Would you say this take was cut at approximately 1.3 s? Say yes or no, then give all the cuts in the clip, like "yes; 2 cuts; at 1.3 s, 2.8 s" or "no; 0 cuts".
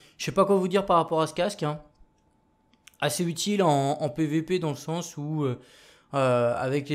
no; 1 cut; at 4.7 s